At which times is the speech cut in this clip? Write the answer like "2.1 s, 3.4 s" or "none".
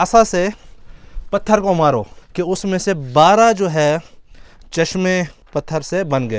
2.2 s, 5.4 s